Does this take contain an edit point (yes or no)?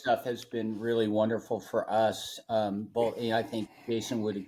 no